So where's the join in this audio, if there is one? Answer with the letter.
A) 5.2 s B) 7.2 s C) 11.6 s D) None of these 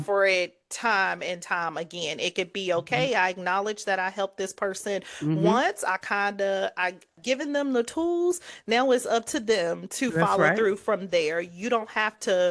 B